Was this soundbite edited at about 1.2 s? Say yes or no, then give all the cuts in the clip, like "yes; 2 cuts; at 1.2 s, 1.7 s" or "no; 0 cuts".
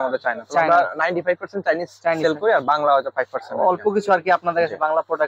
no; 0 cuts